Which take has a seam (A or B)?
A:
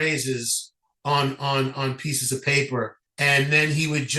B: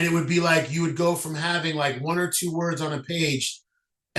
A